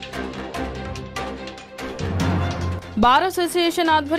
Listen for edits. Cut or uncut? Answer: uncut